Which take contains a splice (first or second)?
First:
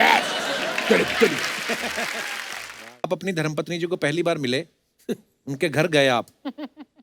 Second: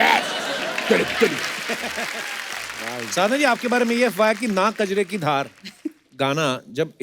first